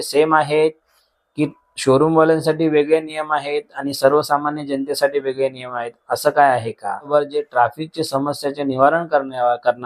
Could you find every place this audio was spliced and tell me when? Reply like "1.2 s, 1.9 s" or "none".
7.1 s

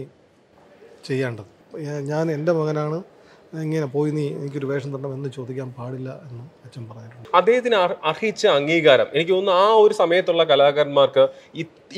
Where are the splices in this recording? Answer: 1.6 s, 7.2 s

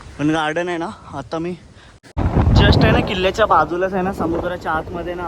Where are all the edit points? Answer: 2.0 s

